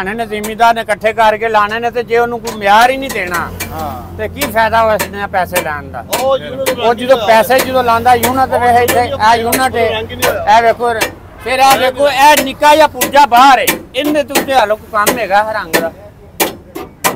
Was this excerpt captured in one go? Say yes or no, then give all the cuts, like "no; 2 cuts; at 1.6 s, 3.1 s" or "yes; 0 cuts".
yes; 0 cuts